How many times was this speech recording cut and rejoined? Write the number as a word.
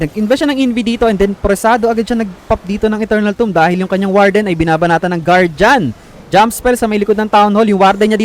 zero